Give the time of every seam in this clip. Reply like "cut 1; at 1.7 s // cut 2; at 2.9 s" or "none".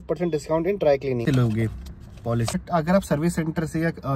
cut 1; at 1.2 s // cut 2; at 2.6 s